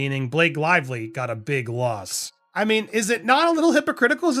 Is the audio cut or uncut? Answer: cut